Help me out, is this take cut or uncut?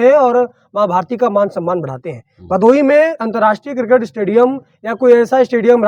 uncut